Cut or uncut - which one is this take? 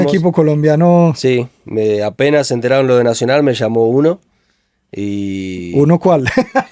uncut